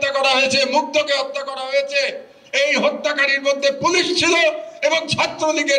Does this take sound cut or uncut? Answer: uncut